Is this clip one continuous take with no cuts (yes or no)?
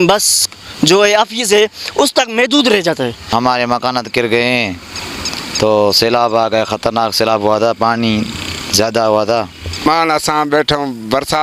no